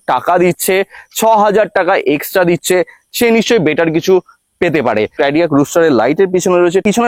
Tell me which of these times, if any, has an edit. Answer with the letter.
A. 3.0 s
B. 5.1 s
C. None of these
B